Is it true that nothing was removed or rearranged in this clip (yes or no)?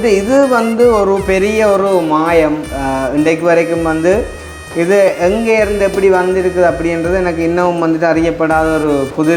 yes